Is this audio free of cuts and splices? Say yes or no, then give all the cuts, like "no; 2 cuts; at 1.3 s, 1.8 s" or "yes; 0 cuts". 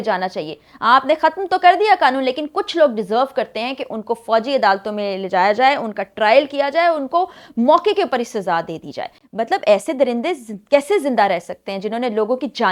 yes; 0 cuts